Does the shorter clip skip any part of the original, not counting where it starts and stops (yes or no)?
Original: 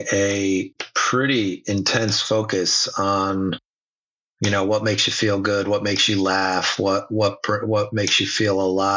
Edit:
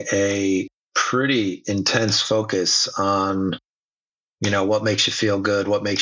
no